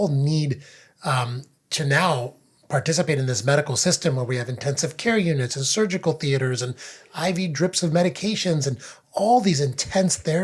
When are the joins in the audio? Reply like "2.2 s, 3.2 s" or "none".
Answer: none